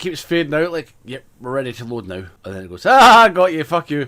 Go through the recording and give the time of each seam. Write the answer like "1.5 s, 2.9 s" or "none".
2.4 s